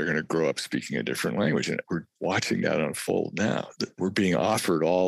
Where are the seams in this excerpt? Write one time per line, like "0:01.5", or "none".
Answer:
0:01.8
0:04.0